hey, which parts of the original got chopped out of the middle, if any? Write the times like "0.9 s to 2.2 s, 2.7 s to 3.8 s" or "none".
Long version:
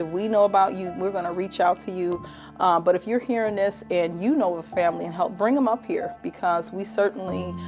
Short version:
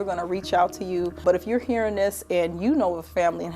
2.3 s to 2.8 s

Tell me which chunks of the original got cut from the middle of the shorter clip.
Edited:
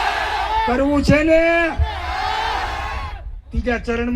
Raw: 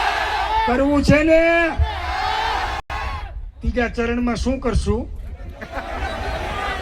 2.8 s to 2.9 s

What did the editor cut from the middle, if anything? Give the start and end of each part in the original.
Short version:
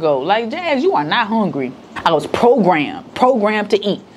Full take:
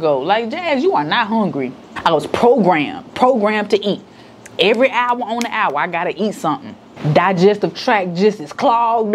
none

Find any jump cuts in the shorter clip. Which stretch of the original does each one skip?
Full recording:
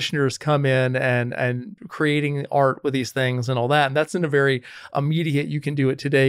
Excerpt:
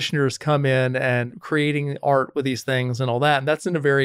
1.3 s to 1.8 s

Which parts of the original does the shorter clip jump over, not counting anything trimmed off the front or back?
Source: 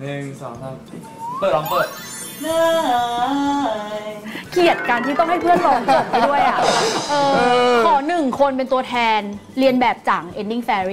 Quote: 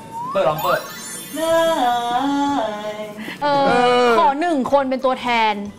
4.4 s to 7.0 s

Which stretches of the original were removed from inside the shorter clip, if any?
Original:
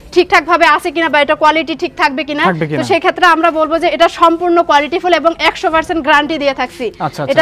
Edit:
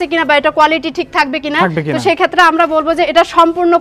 none

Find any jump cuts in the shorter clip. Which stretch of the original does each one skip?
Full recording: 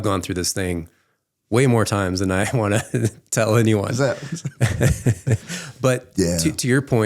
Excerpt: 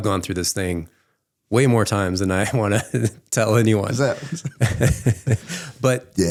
none

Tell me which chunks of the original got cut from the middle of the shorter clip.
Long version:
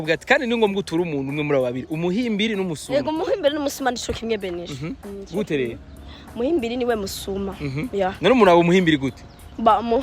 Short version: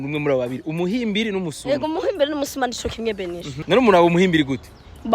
4.9 s to 8.2 s

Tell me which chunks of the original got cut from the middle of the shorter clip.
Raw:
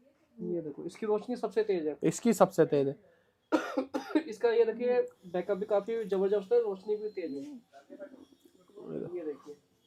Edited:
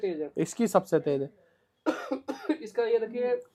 none

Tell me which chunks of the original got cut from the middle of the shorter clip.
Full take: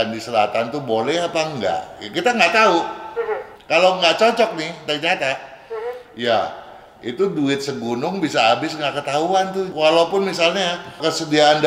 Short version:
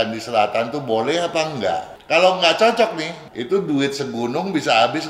1.9 s to 3.5 s, 4.7 s to 6.8 s

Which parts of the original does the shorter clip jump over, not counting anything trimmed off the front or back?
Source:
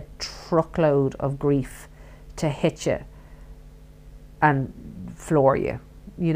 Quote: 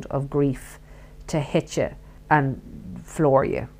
3.2 s to 4.2 s

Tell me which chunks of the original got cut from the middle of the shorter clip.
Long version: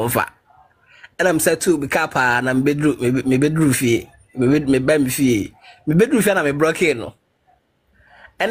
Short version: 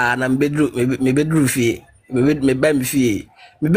none

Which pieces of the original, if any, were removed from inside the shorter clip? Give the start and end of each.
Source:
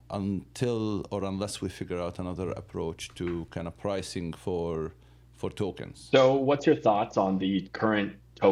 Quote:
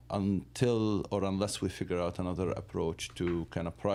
none

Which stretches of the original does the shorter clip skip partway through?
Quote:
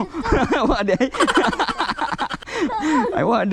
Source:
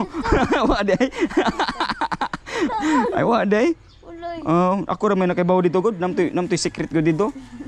none

